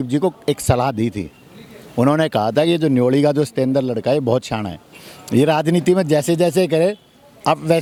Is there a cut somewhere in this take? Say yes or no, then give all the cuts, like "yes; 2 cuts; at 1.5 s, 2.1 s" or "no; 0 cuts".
no; 0 cuts